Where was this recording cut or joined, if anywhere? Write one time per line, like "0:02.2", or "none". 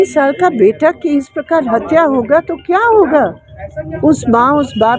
none